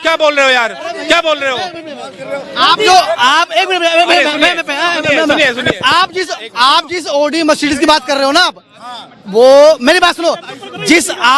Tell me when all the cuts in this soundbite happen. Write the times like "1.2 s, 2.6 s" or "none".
none